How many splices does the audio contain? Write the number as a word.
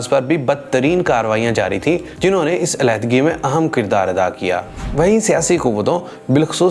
one